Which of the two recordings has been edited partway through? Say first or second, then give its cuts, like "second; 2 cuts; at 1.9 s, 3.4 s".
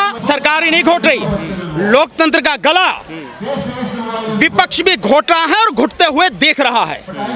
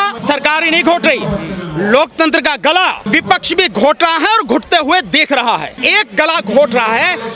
second; 2 cuts; at 3.0 s, 5.8 s